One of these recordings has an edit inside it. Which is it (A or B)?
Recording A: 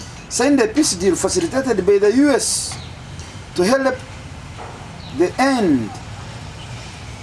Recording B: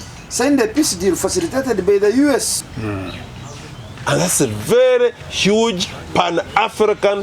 B